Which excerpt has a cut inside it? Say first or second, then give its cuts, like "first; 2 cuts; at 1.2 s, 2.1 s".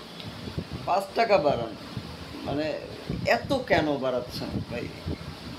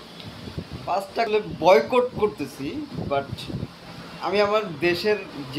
second; 1 cut; at 1.3 s